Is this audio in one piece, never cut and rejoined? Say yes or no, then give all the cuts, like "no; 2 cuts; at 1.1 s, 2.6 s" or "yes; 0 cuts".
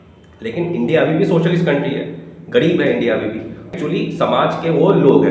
no; 1 cut; at 3.7 s